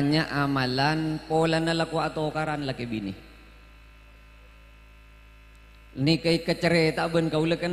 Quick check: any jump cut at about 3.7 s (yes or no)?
no